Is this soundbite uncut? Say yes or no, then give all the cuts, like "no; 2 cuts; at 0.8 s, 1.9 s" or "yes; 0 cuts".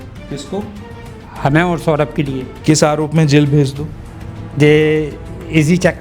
yes; 0 cuts